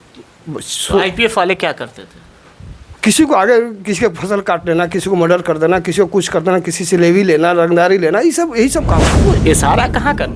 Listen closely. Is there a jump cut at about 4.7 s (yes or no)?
no